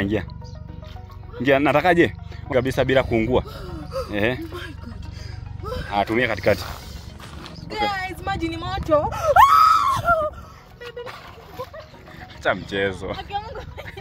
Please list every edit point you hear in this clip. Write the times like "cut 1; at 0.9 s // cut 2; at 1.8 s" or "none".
cut 1; at 2.5 s